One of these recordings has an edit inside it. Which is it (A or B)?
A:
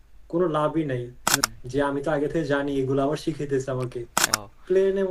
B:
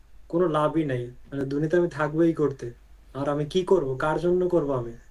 A